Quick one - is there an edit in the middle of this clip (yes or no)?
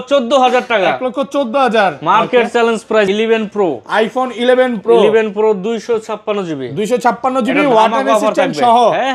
yes